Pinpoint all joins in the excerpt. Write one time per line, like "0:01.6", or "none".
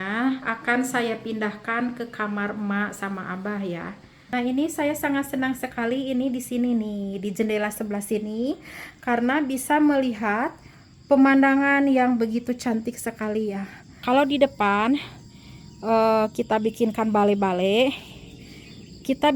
0:04.3
0:14.0